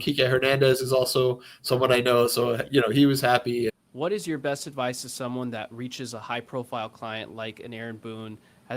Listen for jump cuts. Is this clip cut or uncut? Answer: cut